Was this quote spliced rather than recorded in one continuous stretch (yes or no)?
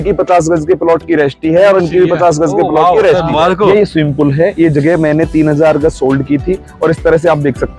yes